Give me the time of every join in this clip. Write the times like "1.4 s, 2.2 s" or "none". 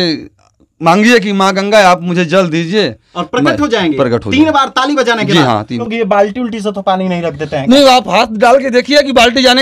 5.8 s